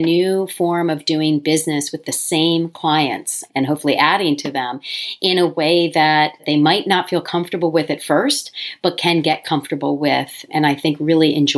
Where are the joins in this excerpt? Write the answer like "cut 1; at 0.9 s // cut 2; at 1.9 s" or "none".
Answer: cut 1; at 10.4 s